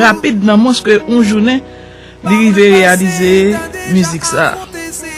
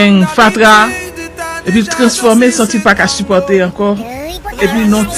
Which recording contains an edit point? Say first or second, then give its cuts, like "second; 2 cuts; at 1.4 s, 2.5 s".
first; 1 cut; at 3.0 s